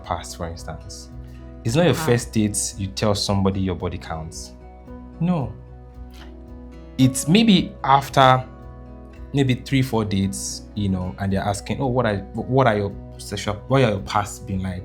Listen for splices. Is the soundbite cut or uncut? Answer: uncut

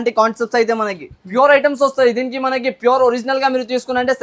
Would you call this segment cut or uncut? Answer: cut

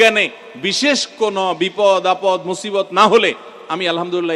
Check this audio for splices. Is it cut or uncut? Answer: uncut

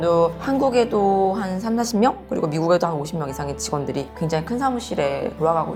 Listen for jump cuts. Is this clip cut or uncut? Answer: uncut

